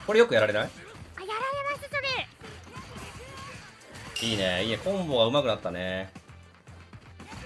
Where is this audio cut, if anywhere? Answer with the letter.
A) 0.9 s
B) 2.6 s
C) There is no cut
B